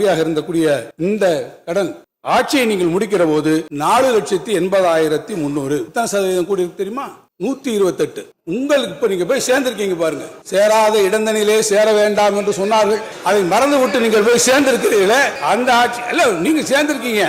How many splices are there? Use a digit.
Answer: 4